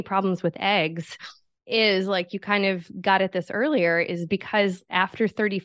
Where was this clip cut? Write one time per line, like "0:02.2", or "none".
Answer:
none